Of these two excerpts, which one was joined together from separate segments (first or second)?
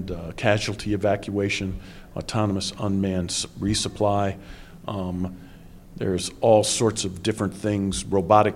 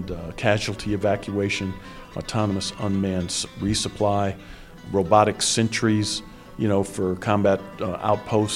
second